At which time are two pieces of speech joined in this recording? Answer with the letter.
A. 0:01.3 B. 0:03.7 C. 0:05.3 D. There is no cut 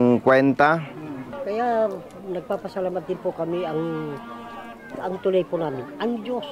A